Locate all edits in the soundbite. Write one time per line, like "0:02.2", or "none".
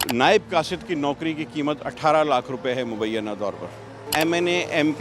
0:04.0

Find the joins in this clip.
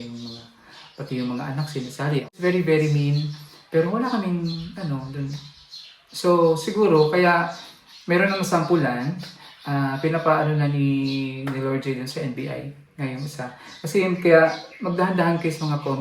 0:02.3

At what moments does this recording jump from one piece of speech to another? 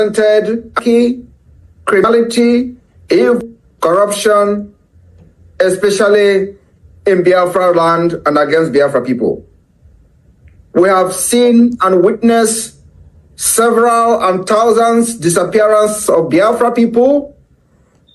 0:00.8
0:02.0
0:03.4

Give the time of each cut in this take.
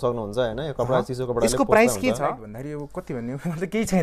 0:02.5

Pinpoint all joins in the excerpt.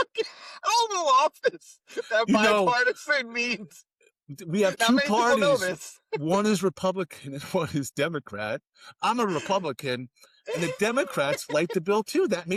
none

